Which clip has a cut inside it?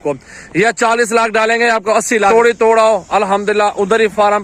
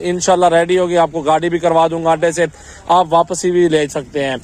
first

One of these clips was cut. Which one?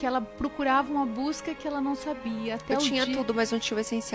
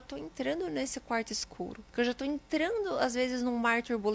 second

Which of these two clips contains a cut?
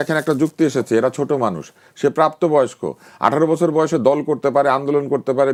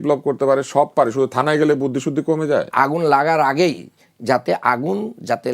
second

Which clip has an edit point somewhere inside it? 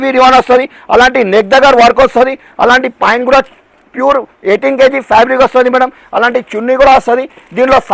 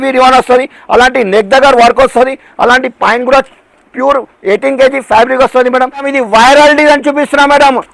second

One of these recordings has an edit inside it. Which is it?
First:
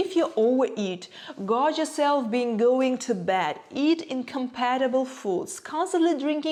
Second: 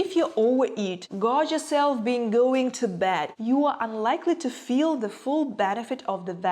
second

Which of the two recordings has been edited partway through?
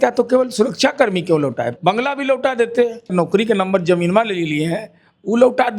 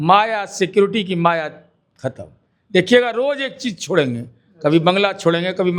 first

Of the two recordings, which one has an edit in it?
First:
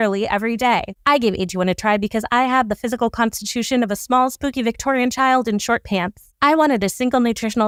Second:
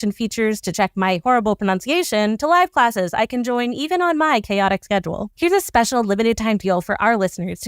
second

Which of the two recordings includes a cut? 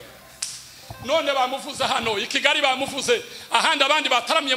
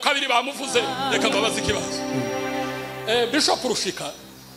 second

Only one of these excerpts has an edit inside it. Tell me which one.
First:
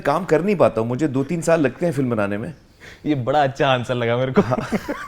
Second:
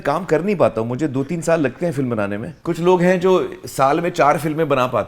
second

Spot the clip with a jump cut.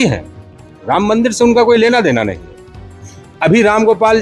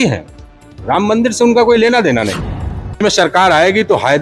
second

